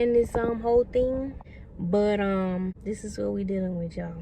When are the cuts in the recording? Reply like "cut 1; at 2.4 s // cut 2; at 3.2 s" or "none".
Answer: cut 1; at 2.8 s